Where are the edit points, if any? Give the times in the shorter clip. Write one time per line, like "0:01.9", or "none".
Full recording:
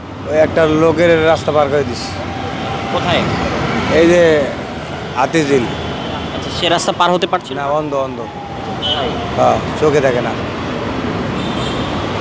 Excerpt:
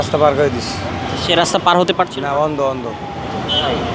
0:01.1

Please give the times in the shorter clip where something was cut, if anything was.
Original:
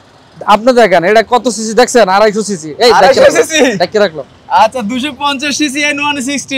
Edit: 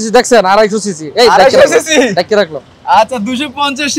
none

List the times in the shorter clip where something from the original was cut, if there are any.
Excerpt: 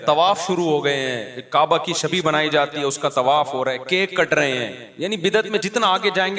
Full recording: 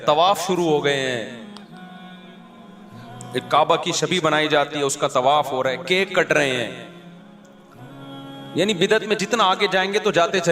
0:01.3
0:04.8

